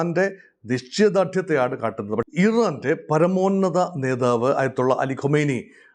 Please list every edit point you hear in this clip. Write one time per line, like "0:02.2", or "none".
0:02.2